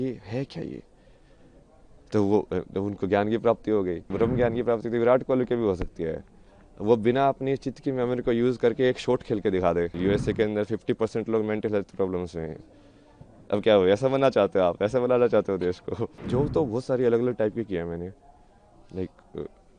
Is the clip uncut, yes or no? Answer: no